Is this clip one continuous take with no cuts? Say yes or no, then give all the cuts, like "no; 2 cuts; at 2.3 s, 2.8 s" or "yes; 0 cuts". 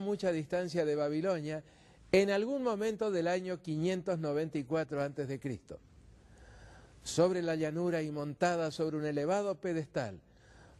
no; 1 cut; at 6.4 s